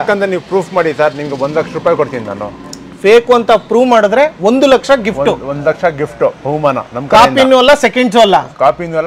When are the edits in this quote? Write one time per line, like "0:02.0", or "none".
none